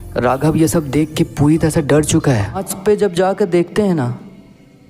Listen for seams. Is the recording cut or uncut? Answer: cut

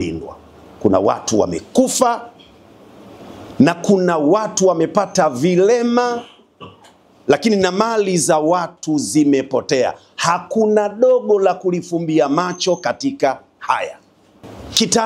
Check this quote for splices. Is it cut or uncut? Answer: uncut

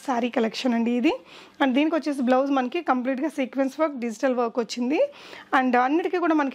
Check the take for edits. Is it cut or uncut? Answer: uncut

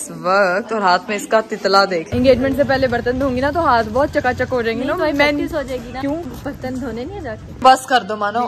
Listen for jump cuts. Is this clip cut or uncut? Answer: cut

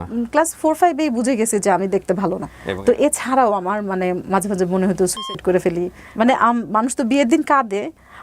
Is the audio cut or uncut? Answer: cut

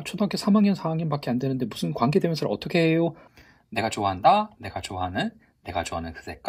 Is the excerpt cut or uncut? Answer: cut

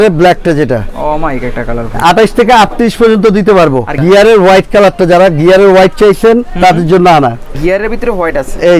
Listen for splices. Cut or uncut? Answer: cut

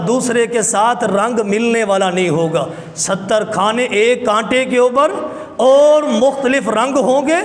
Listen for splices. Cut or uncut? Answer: uncut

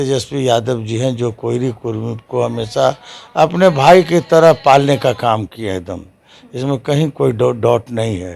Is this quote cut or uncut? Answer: uncut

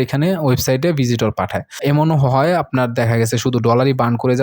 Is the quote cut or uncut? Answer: cut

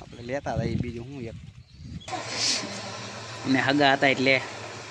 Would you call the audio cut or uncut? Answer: cut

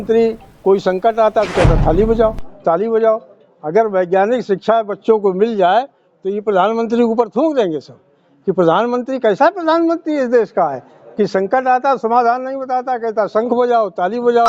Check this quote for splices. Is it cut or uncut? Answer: uncut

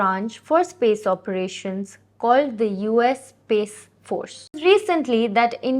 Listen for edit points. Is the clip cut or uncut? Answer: cut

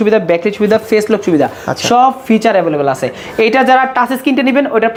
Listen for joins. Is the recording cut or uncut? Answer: uncut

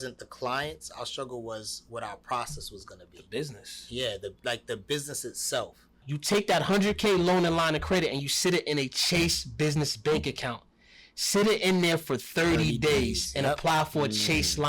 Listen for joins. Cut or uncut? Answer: cut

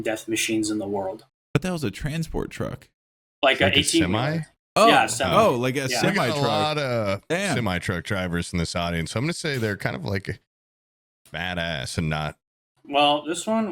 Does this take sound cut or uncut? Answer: cut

